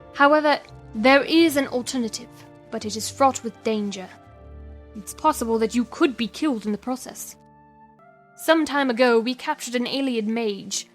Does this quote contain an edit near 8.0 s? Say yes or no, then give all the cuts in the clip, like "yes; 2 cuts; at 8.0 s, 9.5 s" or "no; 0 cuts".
yes; 1 cut; at 8.0 s